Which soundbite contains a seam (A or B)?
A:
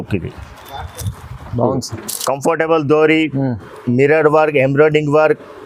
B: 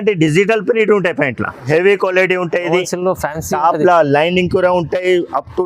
B